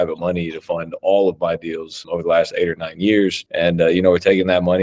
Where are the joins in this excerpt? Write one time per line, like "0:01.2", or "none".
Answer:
0:01.9
0:03.4

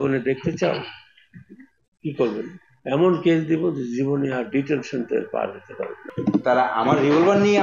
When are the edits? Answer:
0:06.0

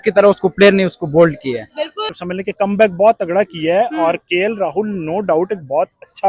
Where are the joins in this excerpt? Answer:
0:02.0

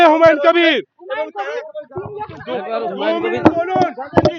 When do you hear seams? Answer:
none

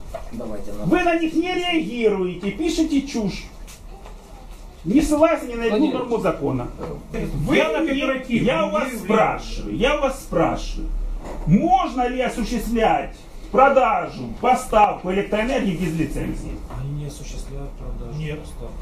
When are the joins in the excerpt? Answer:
0:07.1

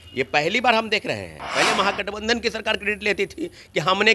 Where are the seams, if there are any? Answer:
0:01.4

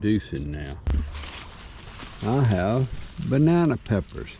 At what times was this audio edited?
0:01.0

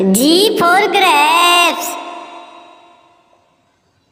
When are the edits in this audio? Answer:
none

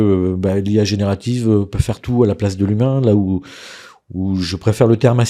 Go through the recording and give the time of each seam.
none

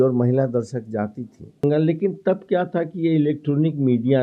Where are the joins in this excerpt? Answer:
0:01.6

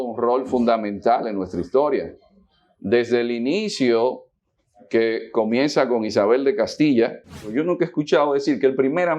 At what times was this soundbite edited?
0:07.4

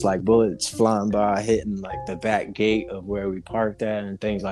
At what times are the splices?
none

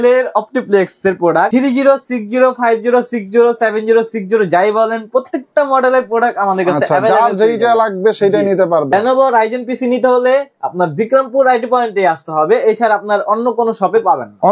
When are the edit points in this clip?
0:01.5
0:08.9

